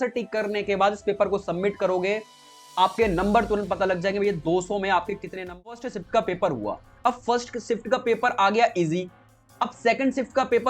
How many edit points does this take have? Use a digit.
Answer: 1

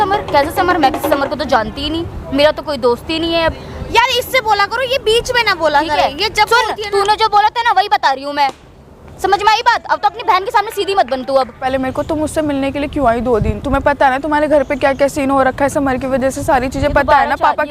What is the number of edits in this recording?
1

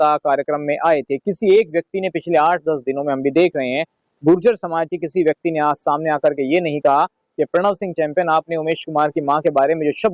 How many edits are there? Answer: 0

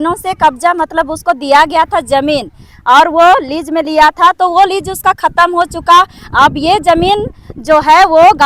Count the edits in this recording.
0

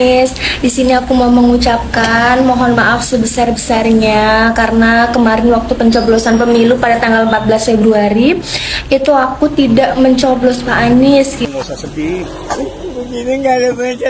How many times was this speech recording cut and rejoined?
1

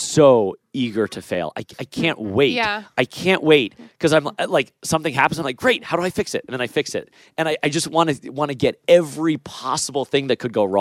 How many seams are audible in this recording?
0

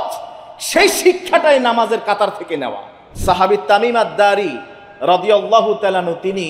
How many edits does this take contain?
1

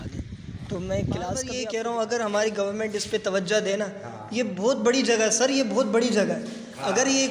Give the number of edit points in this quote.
1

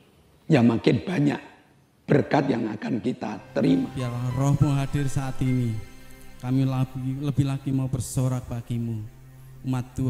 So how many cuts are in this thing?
1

